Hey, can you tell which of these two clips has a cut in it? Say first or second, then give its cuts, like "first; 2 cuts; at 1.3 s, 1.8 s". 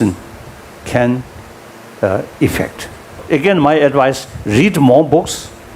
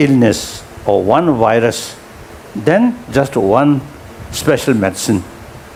first; 1 cut; at 3.2 s